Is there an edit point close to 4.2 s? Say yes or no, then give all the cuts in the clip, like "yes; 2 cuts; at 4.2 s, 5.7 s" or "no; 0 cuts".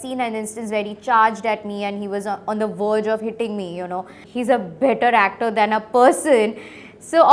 yes; 1 cut; at 4.2 s